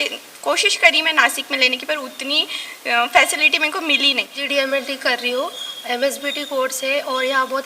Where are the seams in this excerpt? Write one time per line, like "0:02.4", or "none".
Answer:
0:04.4